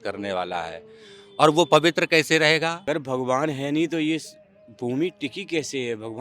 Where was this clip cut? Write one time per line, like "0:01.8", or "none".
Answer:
0:02.8